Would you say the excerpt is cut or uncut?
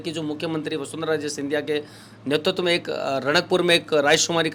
uncut